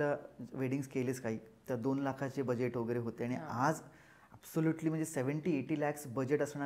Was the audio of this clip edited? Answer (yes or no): no